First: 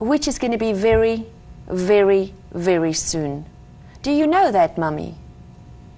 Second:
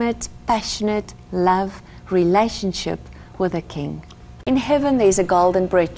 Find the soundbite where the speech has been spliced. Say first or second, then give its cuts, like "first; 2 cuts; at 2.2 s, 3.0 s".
second; 1 cut; at 4.3 s